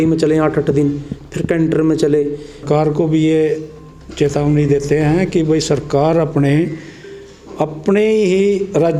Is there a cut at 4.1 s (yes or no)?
no